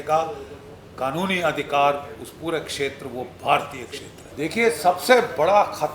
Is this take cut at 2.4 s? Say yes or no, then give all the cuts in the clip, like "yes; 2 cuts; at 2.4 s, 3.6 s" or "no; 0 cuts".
no; 1 cut; at 4.3 s